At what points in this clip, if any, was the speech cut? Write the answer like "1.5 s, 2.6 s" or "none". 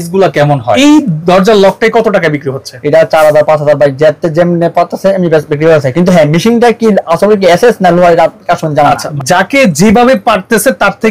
0.8 s, 9.1 s